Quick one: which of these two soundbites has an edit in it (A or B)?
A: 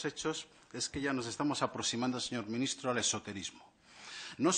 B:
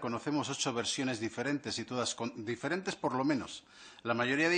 B